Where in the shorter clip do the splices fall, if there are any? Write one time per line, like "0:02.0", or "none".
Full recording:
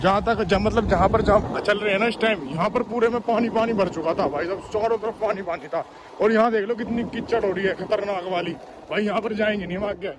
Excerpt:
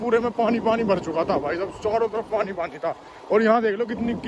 none